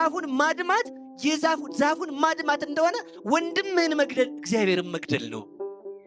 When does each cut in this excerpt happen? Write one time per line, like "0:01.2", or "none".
none